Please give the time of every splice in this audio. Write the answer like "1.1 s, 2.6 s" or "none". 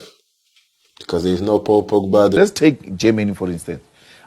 2.3 s